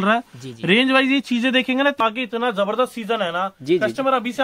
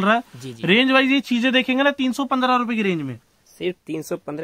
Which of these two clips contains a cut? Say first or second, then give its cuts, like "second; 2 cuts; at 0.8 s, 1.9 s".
first; 1 cut; at 2.0 s